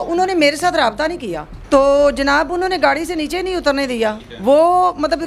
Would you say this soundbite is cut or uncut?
cut